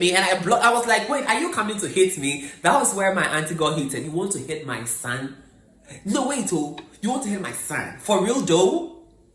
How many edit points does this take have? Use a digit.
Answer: 1